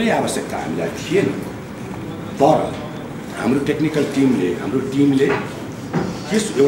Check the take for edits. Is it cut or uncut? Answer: uncut